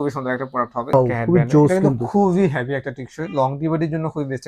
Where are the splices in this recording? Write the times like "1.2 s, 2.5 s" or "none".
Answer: 0.9 s